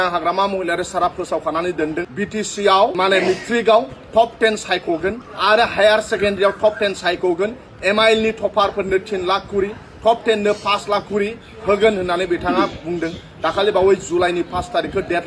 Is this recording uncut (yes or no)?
no